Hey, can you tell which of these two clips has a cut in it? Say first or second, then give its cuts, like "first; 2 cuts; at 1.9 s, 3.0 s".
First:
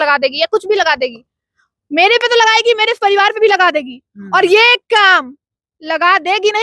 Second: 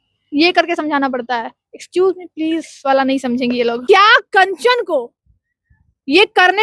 second; 1 cut; at 3.8 s